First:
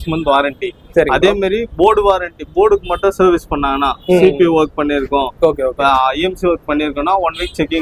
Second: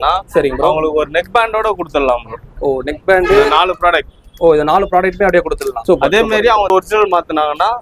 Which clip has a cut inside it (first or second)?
second